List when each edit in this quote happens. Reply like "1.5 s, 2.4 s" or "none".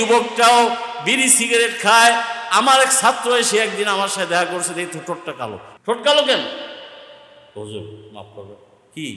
5.7 s

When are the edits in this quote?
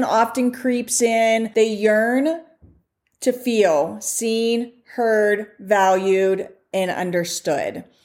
1.5 s

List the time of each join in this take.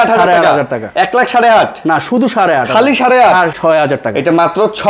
3.6 s

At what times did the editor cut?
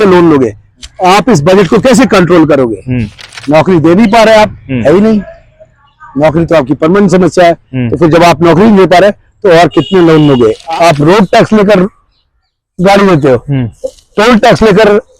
10.6 s

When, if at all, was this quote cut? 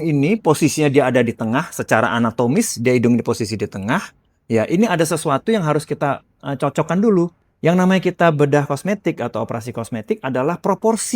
7.5 s

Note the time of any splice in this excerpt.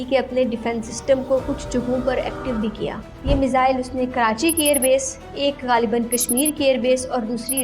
3.1 s

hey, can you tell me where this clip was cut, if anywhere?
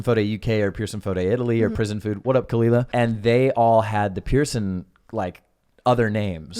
1.7 s, 2.9 s

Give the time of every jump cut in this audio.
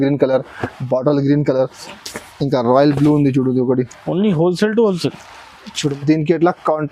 5.9 s

